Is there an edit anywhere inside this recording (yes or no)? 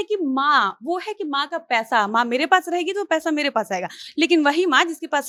no